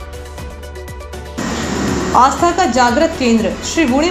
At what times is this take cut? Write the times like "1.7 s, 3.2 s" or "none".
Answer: 1.0 s

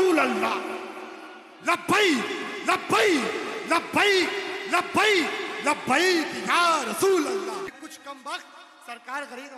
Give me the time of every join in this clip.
7.7 s

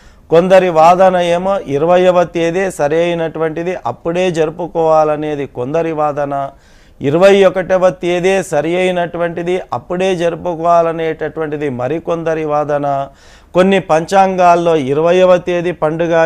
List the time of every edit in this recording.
8.8 s

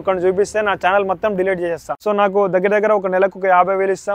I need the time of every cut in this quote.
1.9 s

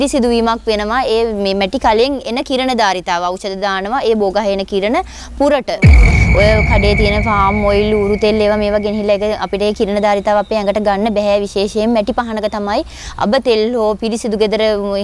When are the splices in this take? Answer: 5.9 s

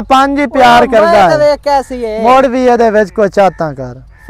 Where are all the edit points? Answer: none

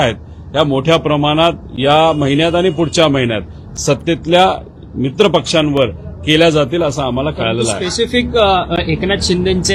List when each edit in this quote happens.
none

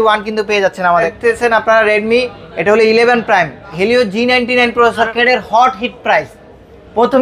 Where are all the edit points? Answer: 1.1 s, 5.1 s

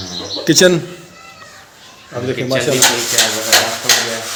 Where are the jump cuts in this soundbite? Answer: none

